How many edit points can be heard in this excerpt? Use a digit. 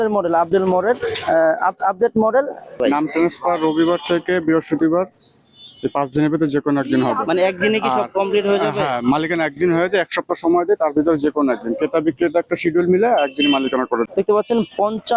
2